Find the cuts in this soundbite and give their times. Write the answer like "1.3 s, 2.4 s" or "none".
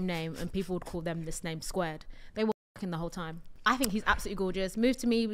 3.5 s